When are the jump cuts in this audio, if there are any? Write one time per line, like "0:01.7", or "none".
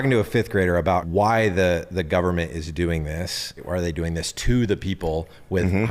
0:01.1
0:03.6